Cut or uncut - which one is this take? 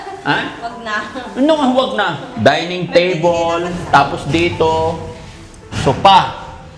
cut